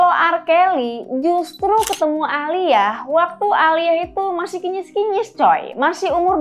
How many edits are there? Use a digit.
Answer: 0